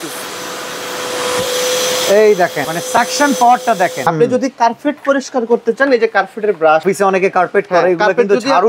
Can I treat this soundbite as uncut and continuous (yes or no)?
no